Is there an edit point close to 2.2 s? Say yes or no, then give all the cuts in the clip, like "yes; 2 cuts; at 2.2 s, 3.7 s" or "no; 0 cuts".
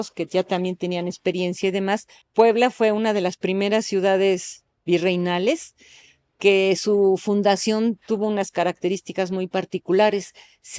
yes; 1 cut; at 2.2 s